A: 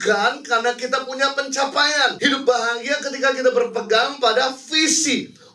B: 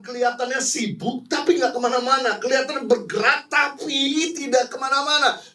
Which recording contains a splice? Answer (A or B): A